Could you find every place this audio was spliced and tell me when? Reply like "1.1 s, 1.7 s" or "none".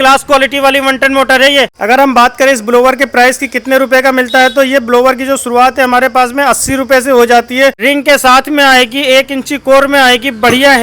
1.8 s, 7.8 s